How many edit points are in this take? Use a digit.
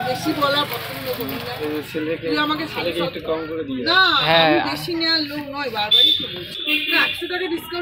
1